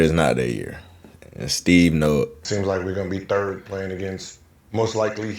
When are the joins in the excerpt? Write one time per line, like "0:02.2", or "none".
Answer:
0:02.4